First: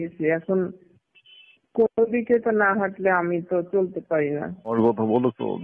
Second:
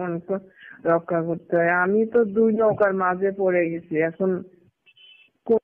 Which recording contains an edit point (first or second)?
first